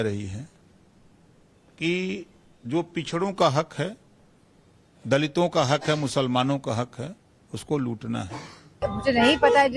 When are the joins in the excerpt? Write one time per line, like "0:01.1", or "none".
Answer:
0:06.9